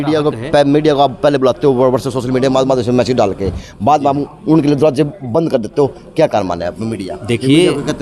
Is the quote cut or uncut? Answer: uncut